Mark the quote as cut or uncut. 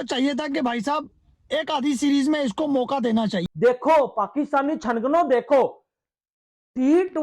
cut